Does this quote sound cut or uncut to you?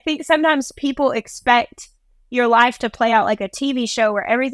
uncut